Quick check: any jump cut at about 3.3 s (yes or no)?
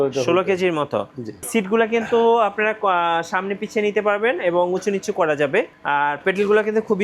no